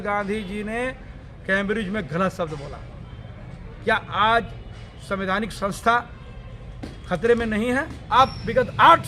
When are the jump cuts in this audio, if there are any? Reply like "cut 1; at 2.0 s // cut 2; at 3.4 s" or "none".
cut 1; at 8.0 s